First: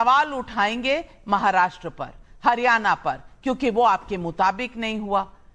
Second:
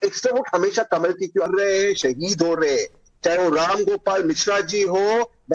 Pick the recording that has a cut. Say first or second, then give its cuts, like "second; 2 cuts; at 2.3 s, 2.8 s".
second; 1 cut; at 1.5 s